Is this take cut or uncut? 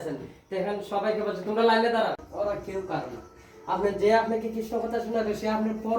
cut